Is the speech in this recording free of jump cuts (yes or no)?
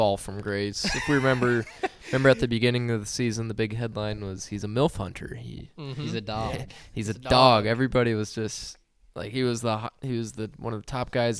yes